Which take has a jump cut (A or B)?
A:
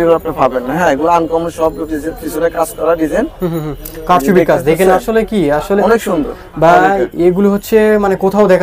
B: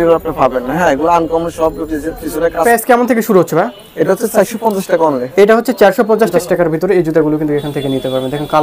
B